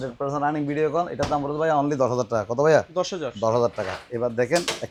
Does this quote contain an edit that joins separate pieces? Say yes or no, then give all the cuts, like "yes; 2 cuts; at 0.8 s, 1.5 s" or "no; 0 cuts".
no; 0 cuts